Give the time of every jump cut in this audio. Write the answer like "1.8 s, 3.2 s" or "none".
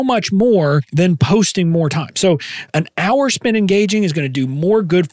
0.9 s, 2.6 s